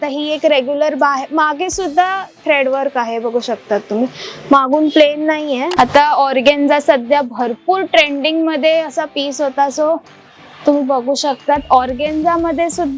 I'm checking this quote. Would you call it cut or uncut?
cut